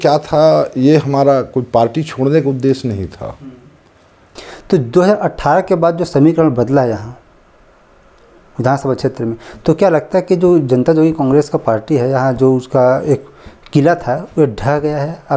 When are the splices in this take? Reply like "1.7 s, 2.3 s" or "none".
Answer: 4.2 s